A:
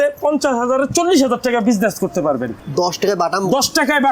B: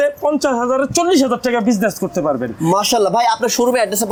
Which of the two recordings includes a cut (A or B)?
A